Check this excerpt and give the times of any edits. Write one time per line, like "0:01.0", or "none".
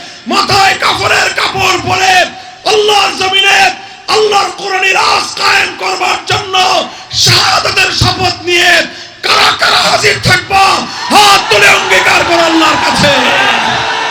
none